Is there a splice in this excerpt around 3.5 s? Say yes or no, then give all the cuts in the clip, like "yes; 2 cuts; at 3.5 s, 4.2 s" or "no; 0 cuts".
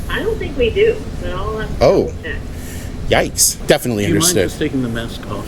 yes; 1 cut; at 3.5 s